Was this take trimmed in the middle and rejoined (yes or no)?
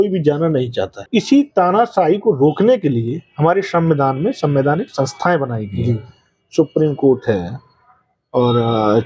yes